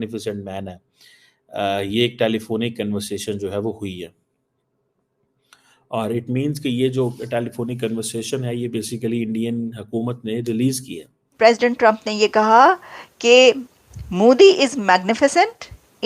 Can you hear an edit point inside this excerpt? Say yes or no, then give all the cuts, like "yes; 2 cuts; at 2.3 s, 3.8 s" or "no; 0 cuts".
yes; 1 cut; at 11.3 s